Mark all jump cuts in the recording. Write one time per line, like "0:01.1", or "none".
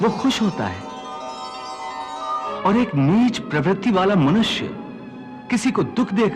0:02.5